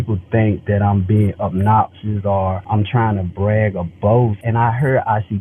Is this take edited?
yes; 2 cuts; at 2.6 s, 4.4 s

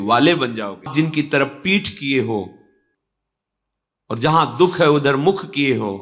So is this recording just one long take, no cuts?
no; 1 cut; at 0.9 s

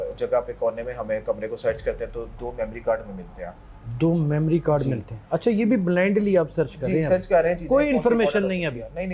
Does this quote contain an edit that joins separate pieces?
no; 0 cuts

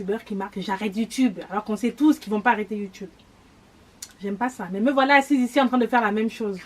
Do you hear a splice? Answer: no; 0 cuts

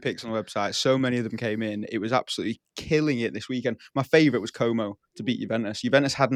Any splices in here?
no; 0 cuts

